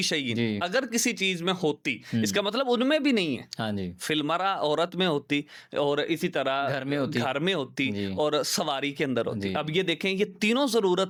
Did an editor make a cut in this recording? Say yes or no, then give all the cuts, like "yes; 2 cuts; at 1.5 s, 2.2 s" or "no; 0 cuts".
no; 0 cuts